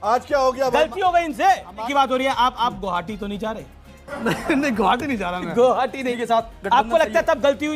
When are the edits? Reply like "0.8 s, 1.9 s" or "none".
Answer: 1.8 s, 6.1 s